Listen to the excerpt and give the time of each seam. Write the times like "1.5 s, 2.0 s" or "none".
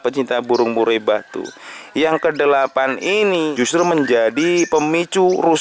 3.5 s